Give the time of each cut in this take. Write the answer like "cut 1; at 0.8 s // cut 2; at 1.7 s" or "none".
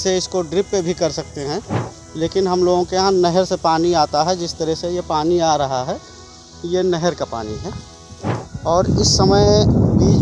cut 1; at 8.5 s